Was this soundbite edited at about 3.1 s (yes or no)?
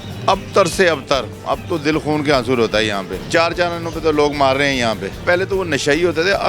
yes